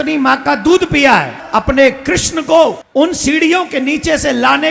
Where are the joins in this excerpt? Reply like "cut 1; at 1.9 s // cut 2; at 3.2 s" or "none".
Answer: cut 1; at 1.4 s // cut 2; at 2.8 s